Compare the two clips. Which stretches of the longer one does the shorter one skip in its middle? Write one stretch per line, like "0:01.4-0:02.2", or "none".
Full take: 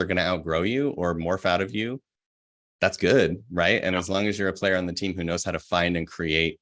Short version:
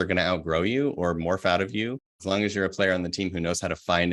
0:02.2-0:04.1